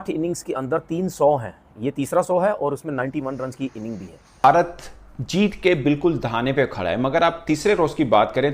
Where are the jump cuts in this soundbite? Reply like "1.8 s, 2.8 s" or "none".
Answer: 4.3 s